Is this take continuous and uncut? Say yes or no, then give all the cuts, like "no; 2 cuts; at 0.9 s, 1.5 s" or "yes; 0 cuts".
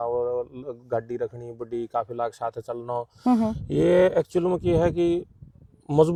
yes; 0 cuts